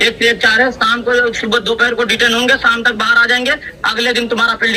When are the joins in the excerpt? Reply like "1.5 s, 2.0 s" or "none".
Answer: none